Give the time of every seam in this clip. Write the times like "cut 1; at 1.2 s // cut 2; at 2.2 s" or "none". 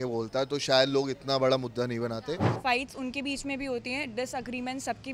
cut 1; at 2.4 s

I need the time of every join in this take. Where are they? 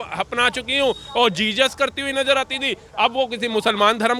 none

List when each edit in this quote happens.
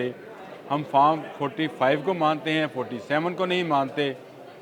none

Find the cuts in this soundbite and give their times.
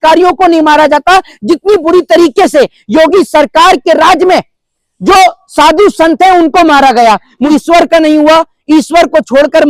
cut 1; at 7.5 s

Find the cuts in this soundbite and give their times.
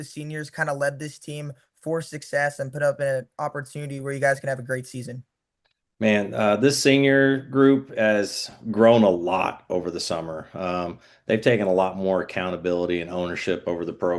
cut 1; at 10.7 s

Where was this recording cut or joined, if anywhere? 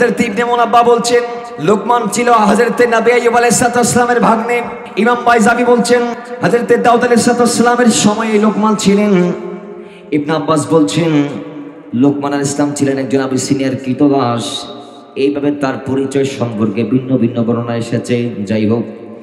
cut 1; at 1.4 s // cut 2; at 4.8 s // cut 3; at 6.2 s

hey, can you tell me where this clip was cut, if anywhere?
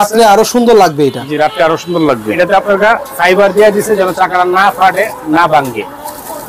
cut 1; at 2.3 s

